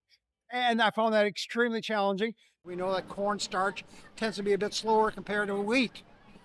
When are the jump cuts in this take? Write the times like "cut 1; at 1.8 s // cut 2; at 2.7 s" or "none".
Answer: cut 1; at 2.6 s